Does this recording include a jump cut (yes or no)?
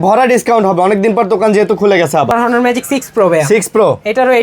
yes